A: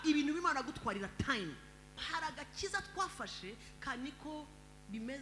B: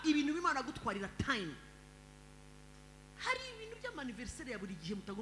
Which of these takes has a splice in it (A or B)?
A